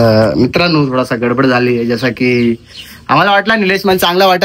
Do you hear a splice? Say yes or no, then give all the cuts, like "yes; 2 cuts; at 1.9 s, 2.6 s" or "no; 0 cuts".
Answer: no; 0 cuts